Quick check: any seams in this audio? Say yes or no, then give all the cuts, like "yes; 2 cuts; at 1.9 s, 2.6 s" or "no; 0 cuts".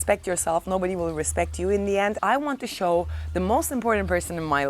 yes; 1 cut; at 2.2 s